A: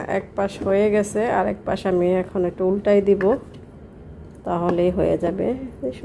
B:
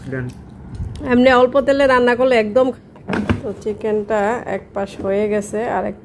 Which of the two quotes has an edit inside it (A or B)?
B